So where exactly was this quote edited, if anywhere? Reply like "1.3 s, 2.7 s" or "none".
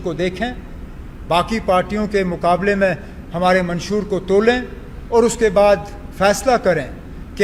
none